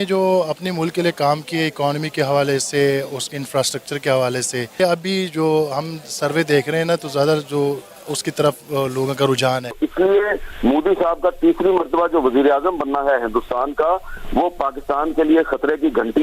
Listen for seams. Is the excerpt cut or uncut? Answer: cut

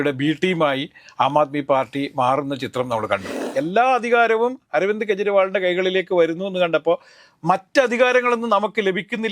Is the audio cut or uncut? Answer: cut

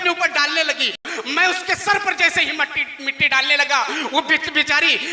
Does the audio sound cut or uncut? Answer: cut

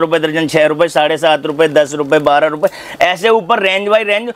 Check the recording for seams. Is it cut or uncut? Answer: uncut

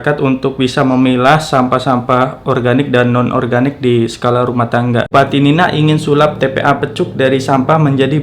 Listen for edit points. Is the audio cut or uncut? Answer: cut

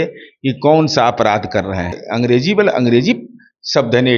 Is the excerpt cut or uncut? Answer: cut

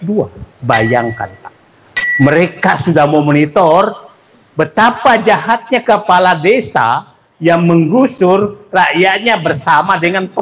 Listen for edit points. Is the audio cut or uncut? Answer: uncut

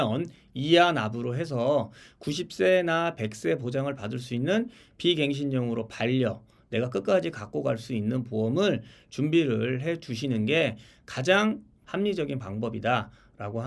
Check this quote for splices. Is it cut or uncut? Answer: cut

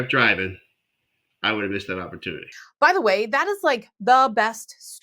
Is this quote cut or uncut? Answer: cut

